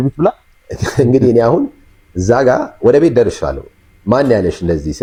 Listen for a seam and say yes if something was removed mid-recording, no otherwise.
no